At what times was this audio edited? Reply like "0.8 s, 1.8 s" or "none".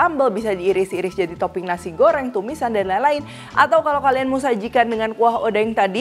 none